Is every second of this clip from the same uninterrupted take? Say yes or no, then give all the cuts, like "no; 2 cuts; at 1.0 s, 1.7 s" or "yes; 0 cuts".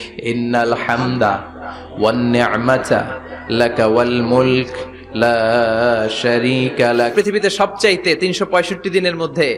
no; 1 cut; at 7.1 s